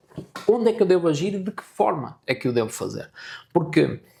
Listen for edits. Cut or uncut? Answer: uncut